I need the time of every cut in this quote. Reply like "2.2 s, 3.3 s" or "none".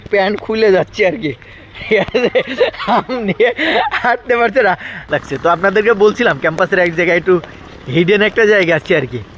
4.9 s